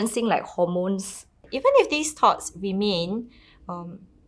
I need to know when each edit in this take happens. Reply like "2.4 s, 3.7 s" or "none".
1.5 s